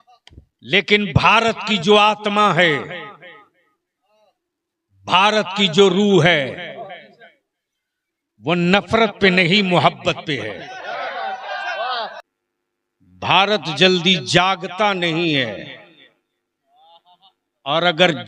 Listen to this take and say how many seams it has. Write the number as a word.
one